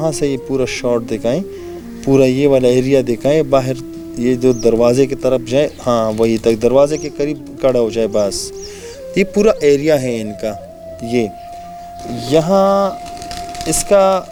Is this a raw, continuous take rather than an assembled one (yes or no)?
yes